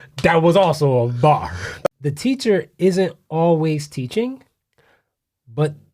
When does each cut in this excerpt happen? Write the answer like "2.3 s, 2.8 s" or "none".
1.9 s